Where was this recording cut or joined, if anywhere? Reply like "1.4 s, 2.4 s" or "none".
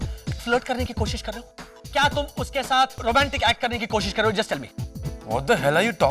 3.0 s